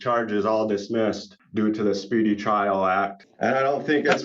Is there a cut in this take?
yes; 2 cuts; at 1.3 s, 3.2 s

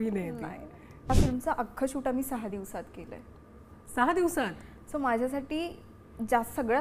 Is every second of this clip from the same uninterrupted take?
no; 1 cut; at 1.1 s

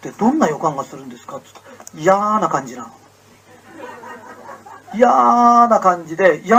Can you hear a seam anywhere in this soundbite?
no; 0 cuts

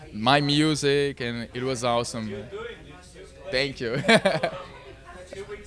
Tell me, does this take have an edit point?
no; 0 cuts

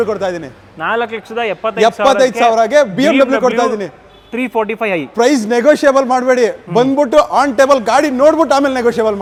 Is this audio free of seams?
yes; 0 cuts

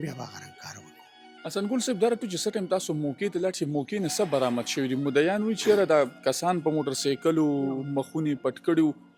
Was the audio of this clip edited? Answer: no; 0 cuts

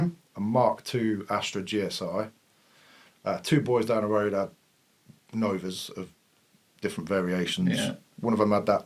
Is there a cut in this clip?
no; 0 cuts

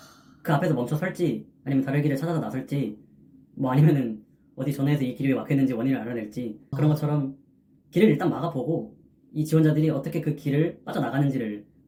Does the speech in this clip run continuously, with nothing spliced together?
yes; 0 cuts

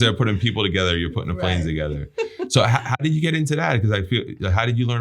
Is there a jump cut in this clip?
no; 0 cuts

